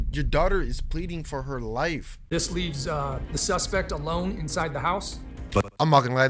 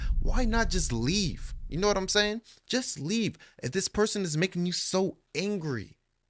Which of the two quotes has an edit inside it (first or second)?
first